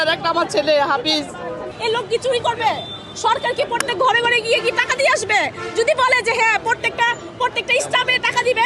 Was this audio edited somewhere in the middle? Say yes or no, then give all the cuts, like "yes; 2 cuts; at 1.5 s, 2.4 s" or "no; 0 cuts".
yes; 1 cut; at 1.7 s